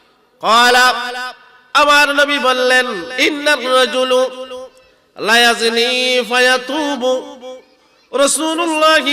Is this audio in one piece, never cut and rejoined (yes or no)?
no